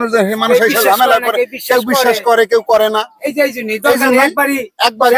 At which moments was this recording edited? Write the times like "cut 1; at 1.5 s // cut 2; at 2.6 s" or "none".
none